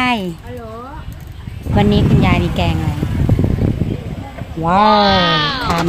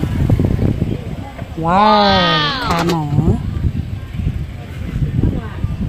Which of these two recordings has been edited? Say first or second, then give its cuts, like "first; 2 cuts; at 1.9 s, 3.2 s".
first; 1 cut; at 1.7 s